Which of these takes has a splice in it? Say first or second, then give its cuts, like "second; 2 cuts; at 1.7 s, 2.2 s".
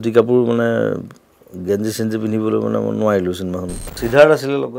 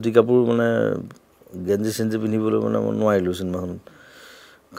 first; 1 cut; at 3.8 s